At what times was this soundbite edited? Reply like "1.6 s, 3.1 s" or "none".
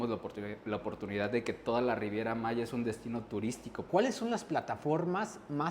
3.8 s

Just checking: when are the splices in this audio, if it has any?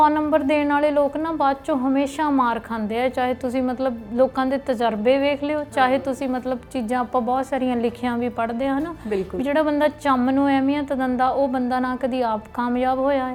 none

